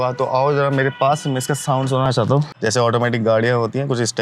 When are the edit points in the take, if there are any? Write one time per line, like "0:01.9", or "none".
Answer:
0:02.2